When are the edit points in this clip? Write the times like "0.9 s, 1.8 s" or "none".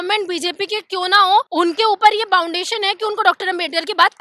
1.5 s